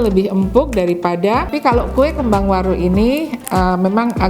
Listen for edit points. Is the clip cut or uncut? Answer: cut